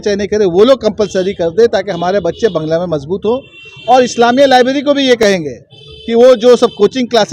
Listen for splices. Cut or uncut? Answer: cut